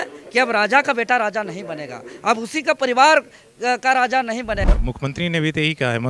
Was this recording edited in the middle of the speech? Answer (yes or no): yes